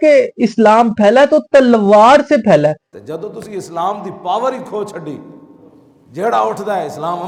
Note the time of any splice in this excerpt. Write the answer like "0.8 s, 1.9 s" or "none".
none